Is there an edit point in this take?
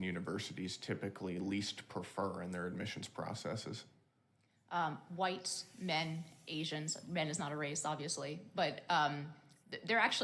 no; 0 cuts

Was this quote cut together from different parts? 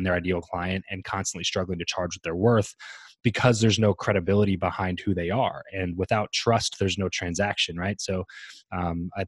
no; 0 cuts

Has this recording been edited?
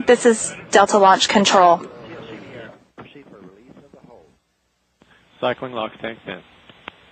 no; 0 cuts

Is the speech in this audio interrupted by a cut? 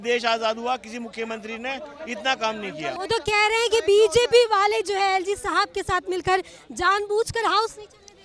no; 0 cuts

